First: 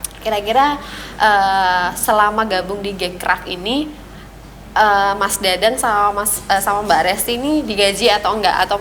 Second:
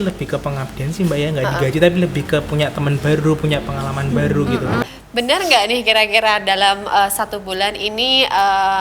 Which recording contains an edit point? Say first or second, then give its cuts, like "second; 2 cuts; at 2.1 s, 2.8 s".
second; 1 cut; at 4.8 s